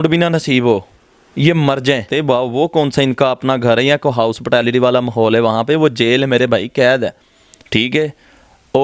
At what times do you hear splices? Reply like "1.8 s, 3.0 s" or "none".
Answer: 2.1 s